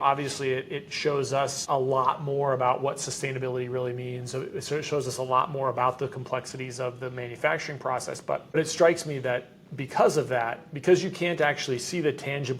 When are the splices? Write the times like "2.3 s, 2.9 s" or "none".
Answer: 1.6 s, 8.6 s